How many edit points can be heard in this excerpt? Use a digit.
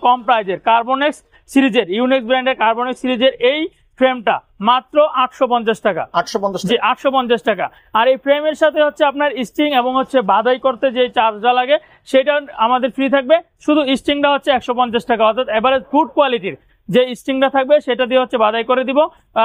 0